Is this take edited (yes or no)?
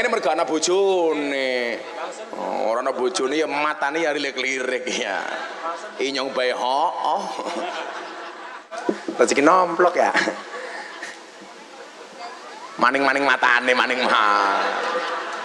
yes